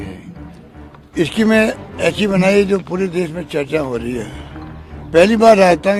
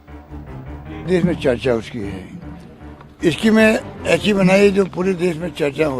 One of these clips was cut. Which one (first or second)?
second